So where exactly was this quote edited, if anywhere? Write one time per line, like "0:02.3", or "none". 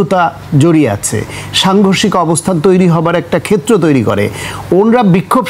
none

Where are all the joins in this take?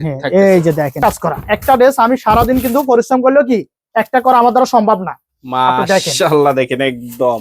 0:01.0

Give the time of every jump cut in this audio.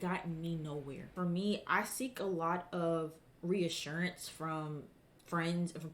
0:01.1

